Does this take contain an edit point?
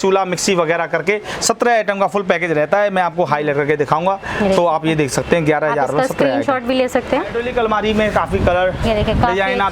yes; 1 cut; at 7.4 s

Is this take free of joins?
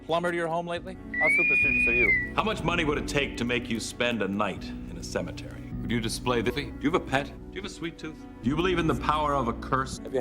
no; 1 cut; at 6.5 s

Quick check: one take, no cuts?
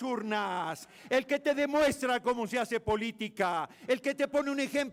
yes; 0 cuts

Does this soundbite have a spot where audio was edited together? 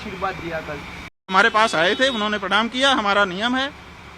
yes; 1 cut; at 1.3 s

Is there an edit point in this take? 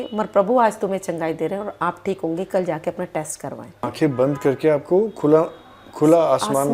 yes; 1 cut; at 3.9 s

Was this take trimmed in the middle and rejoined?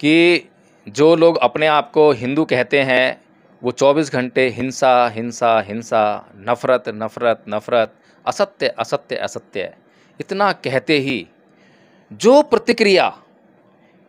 no; 0 cuts

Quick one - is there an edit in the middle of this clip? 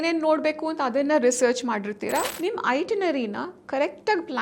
yes; 1 cut; at 2.3 s

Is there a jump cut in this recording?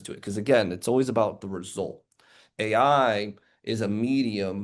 no; 0 cuts

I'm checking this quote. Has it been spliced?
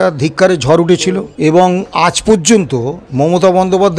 yes; 2 cuts; at 1.3 s, 3.0 s

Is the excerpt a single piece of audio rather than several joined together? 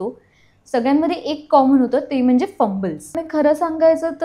no; 1 cut; at 3.2 s

